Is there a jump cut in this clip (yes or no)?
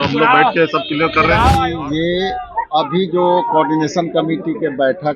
yes